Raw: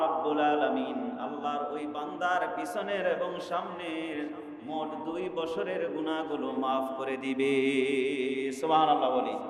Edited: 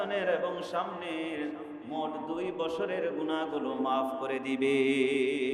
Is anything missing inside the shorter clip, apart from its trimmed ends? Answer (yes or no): no